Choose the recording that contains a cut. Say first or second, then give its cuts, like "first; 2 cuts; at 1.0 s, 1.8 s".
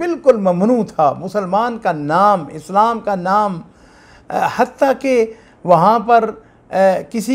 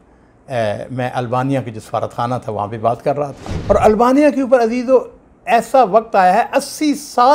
second; 1 cut; at 3.5 s